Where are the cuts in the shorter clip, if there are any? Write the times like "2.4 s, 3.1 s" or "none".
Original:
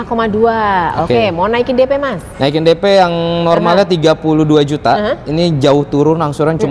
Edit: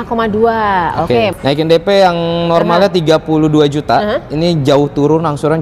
1.3 s